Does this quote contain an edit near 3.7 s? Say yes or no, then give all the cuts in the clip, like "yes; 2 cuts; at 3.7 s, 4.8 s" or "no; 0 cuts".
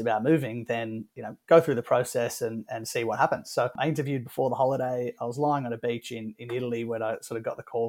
yes; 1 cut; at 3.7 s